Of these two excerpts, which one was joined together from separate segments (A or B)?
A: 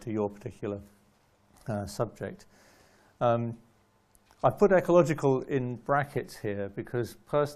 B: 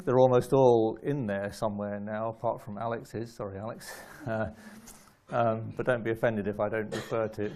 A